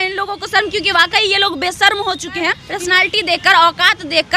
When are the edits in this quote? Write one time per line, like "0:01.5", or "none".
0:02.6